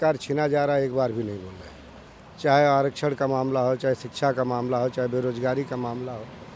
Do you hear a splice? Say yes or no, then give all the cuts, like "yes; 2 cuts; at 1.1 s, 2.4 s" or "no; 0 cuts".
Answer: no; 0 cuts